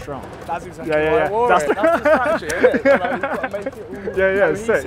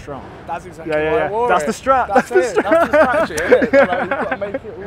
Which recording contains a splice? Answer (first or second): first